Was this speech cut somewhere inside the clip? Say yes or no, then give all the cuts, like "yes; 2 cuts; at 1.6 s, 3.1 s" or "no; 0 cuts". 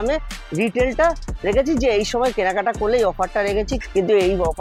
no; 0 cuts